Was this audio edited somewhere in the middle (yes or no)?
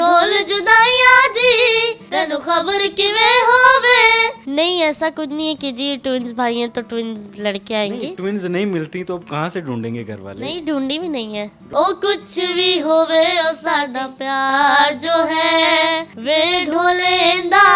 yes